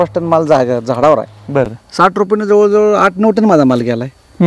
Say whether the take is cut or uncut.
cut